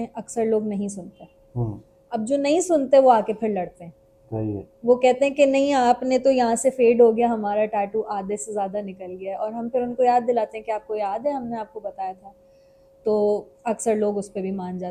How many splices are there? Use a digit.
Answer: 0